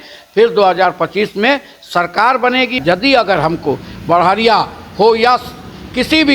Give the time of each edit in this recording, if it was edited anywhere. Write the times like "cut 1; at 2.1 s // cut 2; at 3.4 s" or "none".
cut 1; at 2.8 s